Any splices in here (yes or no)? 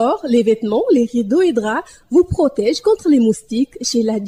no